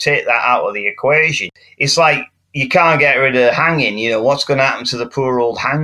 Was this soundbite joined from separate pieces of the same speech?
yes; 1 cut; at 1.5 s

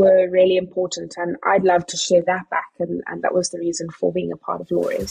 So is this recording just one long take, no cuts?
yes; 0 cuts

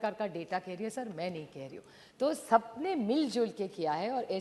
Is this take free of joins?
yes; 0 cuts

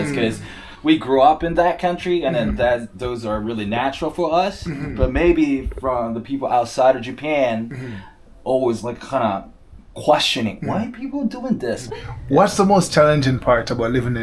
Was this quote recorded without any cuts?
no; 1 cut; at 11.8 s

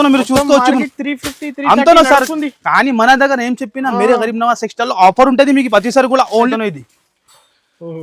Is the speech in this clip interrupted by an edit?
yes; 1 cut; at 6.5 s

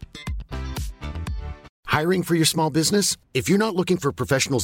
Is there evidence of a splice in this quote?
yes; 1 cut; at 1.7 s

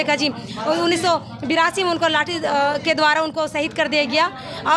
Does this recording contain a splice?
no; 0 cuts

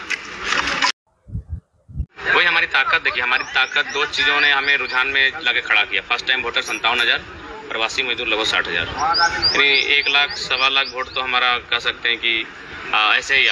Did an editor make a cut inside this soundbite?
yes; 1 cut; at 2.0 s

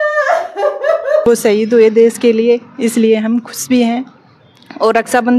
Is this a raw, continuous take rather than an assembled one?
no; 1 cut; at 1.2 s

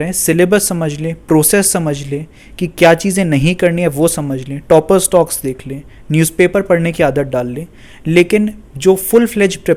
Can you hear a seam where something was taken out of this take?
no; 0 cuts

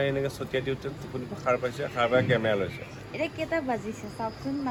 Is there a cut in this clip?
no; 0 cuts

